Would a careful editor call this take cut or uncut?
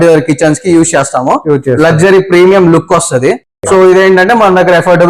cut